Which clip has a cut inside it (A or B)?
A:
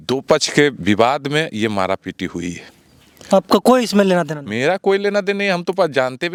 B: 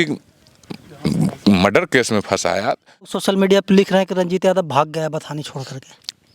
B